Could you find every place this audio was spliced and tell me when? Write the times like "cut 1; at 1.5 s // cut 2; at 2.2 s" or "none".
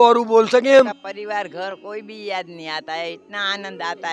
cut 1; at 1.1 s